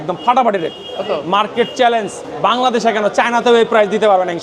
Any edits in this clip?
yes; 1 cut; at 2.2 s

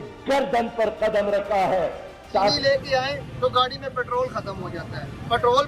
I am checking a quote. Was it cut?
yes; 1 cut; at 2.6 s

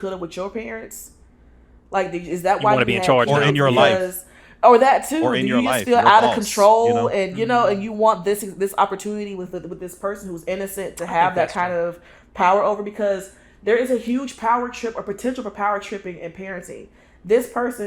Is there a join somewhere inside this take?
no; 0 cuts

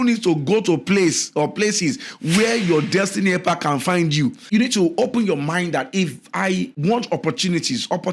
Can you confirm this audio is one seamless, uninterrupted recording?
no; 2 cuts; at 4.5 s, 6.7 s

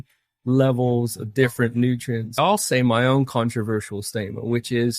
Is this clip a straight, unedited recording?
no; 1 cut; at 2.4 s

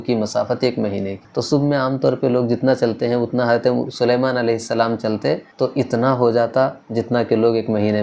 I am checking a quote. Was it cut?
yes; 2 cuts; at 1.2 s, 5.5 s

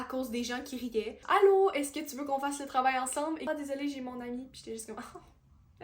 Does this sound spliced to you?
yes; 2 cuts; at 1.2 s, 3.5 s

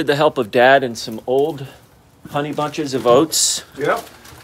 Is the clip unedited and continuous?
yes; 0 cuts

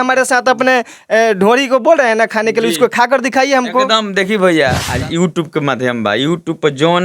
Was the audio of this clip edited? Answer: yes; 1 cut; at 4.9 s

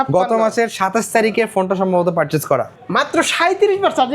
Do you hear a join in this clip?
yes; 1 cut; at 2.7 s

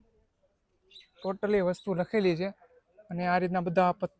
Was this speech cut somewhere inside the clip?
no; 0 cuts

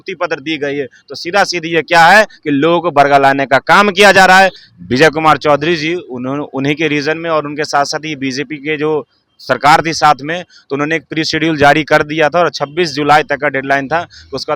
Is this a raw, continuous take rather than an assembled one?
no; 1 cut; at 4.7 s

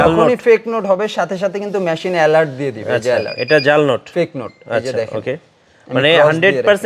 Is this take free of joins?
yes; 0 cuts

